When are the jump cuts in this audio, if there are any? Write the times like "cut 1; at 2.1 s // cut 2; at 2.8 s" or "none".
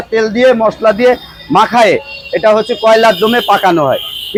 none